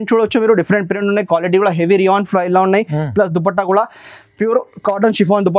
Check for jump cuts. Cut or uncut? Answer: uncut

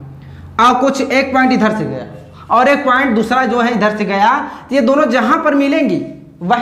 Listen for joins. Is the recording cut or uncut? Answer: uncut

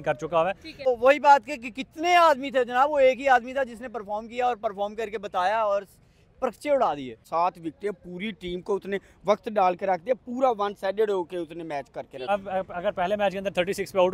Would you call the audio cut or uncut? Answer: cut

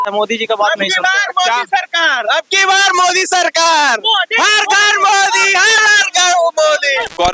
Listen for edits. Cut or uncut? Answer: uncut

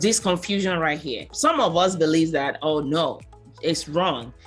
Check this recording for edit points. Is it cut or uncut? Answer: cut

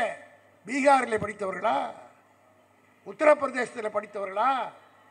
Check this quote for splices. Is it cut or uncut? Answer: uncut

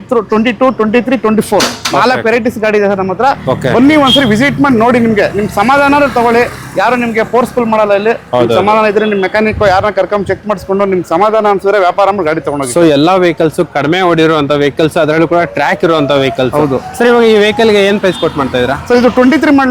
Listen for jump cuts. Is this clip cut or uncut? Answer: uncut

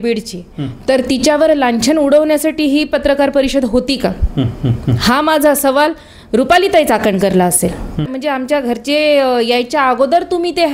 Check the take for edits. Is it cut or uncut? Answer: cut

